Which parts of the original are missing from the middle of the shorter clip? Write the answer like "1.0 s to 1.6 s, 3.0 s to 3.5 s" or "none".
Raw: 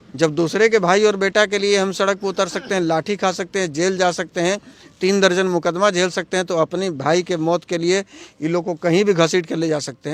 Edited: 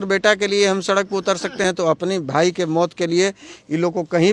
2.8 s to 6.4 s